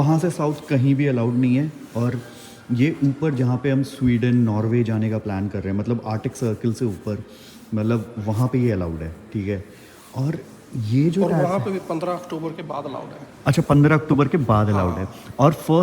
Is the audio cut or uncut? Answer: uncut